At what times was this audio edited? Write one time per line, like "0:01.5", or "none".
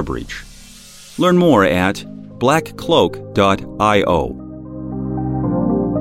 0:04.8